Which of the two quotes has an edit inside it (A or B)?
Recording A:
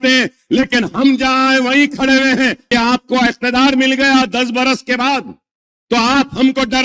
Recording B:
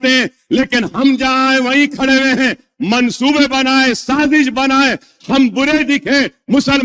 A